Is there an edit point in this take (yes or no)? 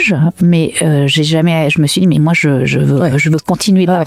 no